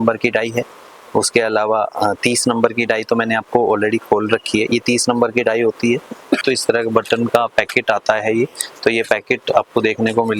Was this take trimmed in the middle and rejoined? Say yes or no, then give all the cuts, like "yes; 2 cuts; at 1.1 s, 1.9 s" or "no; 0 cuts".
yes; 1 cut; at 6.4 s